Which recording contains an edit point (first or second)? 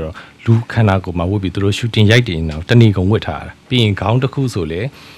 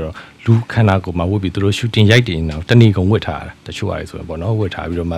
first